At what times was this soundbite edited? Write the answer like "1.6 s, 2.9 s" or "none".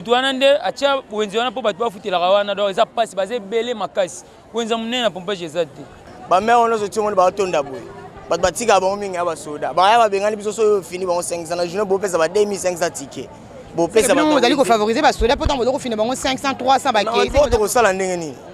6.1 s